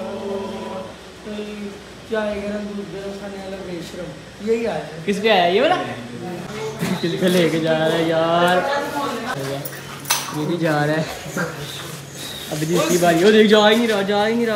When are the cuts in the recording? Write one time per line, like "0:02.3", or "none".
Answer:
0:06.4
0:09.4